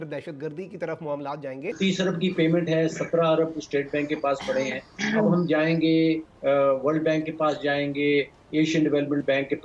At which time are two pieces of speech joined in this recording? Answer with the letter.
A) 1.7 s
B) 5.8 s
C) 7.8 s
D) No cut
A